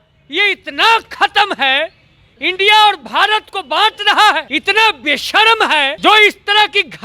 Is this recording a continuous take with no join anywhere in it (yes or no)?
no